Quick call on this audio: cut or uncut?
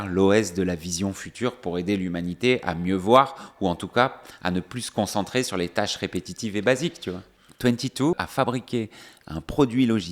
cut